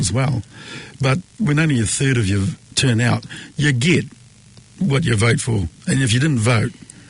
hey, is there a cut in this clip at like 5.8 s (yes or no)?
no